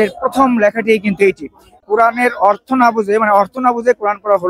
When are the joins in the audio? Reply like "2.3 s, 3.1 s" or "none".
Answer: 1.8 s